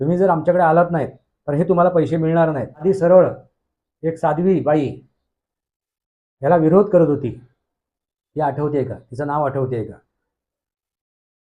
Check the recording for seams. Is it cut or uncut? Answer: cut